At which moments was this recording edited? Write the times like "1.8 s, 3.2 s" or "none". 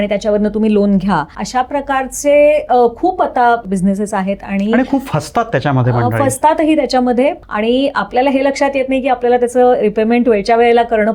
1.4 s, 3.6 s, 7.4 s